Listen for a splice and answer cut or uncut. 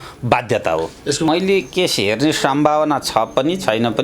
cut